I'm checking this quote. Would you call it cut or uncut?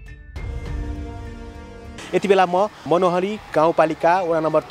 cut